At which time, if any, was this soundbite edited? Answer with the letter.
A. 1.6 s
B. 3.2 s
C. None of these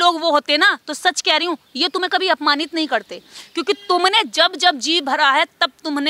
C